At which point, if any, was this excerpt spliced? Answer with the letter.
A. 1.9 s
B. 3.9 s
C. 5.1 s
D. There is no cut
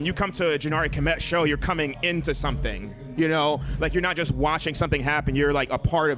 D